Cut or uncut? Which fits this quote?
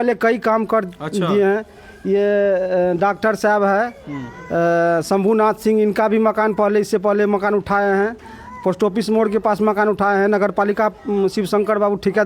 uncut